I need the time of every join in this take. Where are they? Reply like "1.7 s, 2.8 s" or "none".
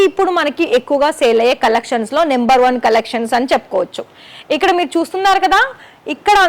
none